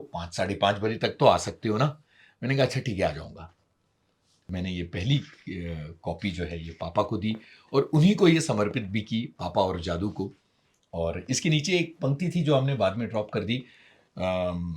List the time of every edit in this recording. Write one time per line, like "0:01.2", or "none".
0:04.5

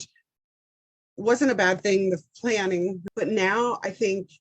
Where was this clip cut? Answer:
0:03.0

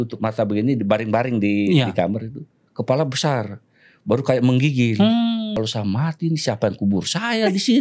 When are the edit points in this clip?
0:05.5

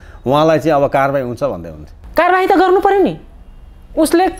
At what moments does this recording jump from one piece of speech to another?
none

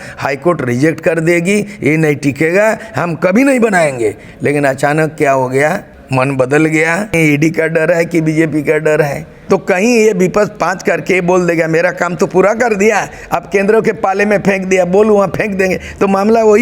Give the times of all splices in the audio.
0:05.9
0:07.1
0:09.3

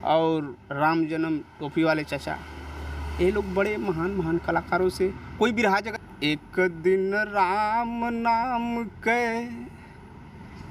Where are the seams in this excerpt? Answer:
0:05.9

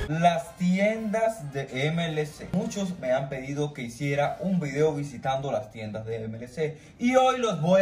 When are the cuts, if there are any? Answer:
none

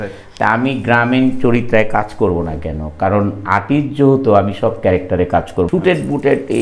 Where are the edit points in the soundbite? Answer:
0:05.7

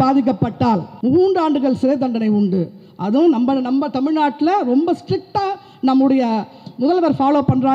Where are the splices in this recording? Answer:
0:00.9

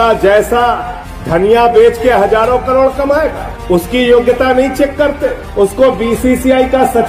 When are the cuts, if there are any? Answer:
none

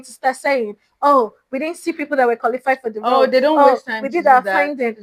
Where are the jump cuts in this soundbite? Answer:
none

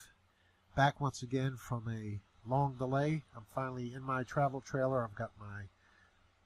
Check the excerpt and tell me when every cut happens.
0:03.6

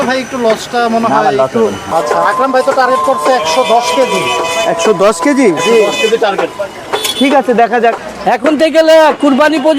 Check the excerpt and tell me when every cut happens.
0:01.8
0:08.1

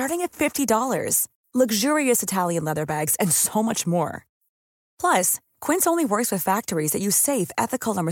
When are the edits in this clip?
none

